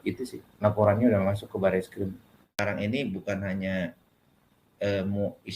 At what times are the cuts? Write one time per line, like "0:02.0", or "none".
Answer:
0:02.5